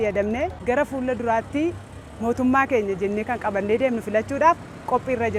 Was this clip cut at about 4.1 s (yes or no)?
no